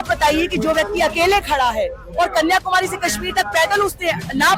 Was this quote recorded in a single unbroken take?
yes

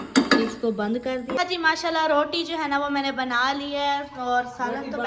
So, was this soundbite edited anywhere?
yes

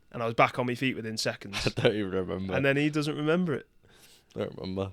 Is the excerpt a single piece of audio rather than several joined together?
yes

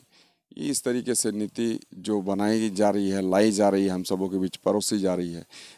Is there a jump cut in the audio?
no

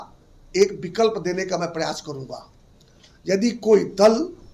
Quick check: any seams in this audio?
no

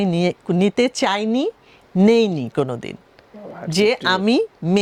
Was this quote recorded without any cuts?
yes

